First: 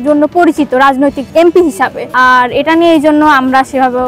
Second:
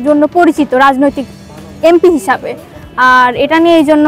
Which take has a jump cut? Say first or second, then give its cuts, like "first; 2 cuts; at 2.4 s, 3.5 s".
first; 2 cuts; at 1.2 s, 2.0 s